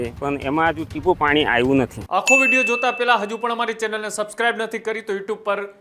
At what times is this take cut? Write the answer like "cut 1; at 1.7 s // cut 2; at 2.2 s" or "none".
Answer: cut 1; at 2.0 s